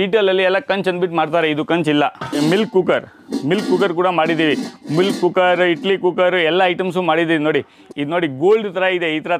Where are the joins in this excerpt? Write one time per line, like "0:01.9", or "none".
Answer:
0:02.3
0:07.8